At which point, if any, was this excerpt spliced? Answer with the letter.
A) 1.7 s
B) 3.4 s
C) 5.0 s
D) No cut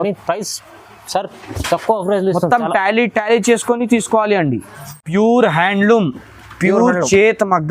C